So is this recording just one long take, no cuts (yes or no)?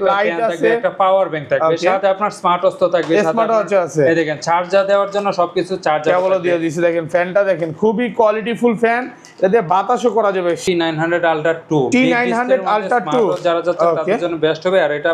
no